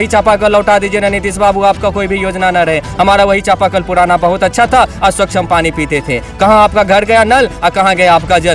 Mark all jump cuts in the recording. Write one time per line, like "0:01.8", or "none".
none